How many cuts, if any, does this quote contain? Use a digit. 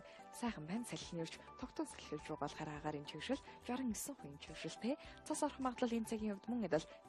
1